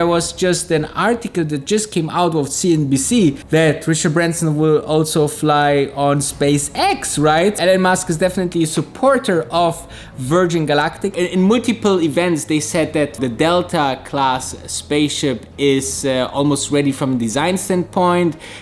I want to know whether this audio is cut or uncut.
cut